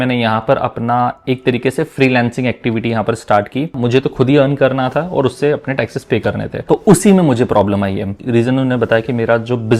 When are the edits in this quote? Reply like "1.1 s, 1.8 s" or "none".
3.7 s, 6.5 s, 8.2 s